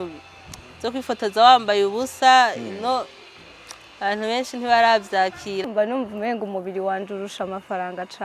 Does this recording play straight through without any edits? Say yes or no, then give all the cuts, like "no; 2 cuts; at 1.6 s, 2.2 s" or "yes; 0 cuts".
no; 1 cut; at 5.6 s